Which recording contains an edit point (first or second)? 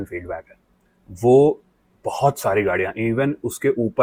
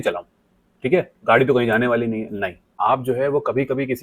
second